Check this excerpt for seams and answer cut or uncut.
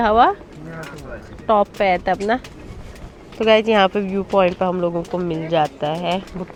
uncut